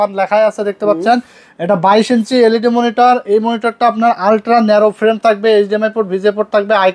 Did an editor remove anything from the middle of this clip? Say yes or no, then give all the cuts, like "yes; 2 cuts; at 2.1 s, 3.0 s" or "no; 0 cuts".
no; 0 cuts